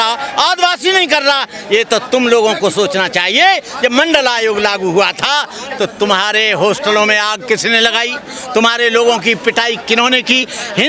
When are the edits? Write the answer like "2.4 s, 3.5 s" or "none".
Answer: none